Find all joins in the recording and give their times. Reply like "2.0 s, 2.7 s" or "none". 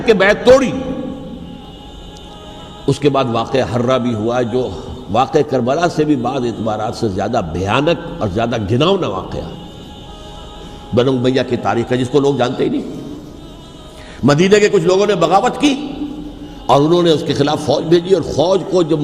1.7 s